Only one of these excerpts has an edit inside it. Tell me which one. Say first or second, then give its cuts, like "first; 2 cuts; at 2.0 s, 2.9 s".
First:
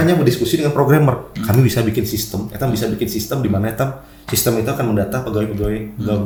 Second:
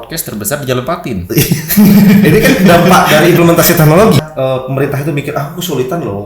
second; 1 cut; at 4.2 s